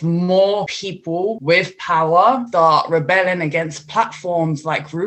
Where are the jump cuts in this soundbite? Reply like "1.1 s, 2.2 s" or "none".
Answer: 1.1 s, 2.5 s